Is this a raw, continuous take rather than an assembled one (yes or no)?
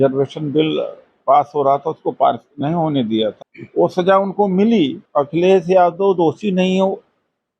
no